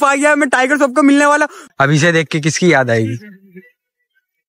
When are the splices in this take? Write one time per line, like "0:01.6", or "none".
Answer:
0:01.6

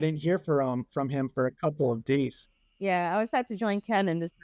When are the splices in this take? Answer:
0:02.4

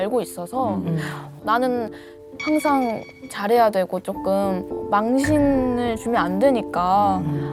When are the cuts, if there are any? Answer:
0:04.7

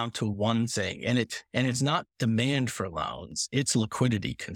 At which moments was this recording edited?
none

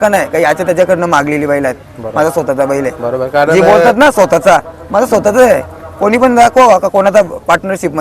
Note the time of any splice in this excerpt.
none

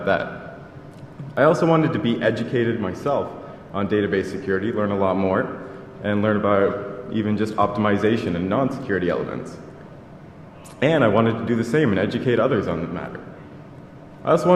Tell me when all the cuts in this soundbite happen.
none

